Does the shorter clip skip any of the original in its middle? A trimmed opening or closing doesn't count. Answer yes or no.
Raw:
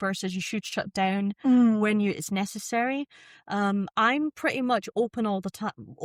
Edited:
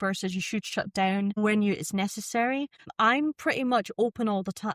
yes